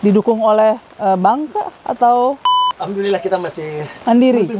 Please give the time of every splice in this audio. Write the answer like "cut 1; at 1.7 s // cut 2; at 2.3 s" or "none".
none